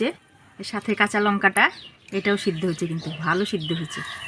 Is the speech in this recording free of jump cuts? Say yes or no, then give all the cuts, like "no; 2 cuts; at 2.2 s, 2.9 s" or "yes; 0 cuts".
yes; 0 cuts